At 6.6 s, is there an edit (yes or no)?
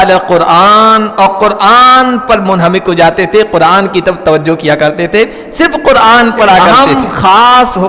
yes